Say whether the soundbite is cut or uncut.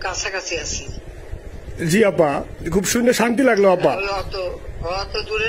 uncut